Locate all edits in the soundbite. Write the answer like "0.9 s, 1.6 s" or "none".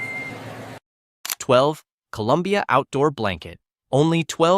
1.0 s

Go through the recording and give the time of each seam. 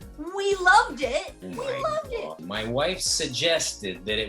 1.4 s, 2.4 s

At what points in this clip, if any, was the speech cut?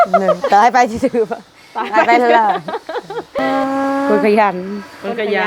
3.4 s

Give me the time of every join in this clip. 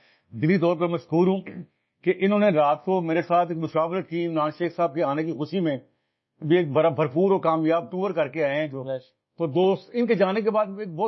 none

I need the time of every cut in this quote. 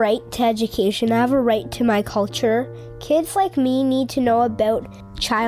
none

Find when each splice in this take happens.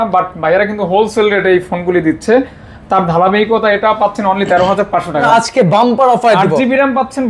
5.3 s

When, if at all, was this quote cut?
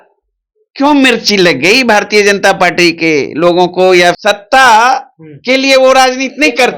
4.2 s

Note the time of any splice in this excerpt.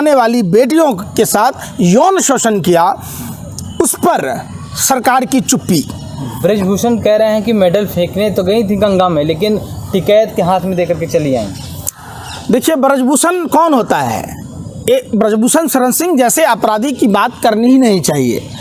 none

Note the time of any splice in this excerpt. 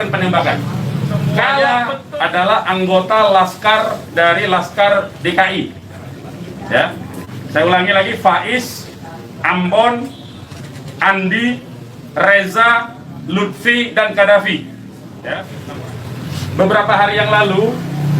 1.7 s, 15.5 s

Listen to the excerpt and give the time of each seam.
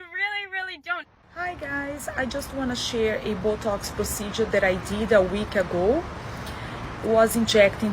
1.2 s

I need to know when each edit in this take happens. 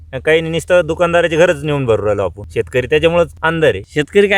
2.4 s, 3.4 s

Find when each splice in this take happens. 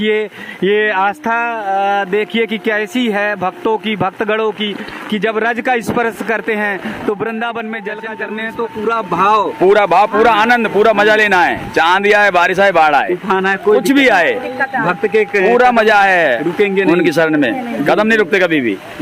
8.1 s

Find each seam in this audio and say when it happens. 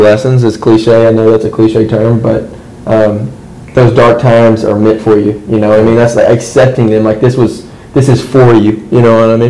none

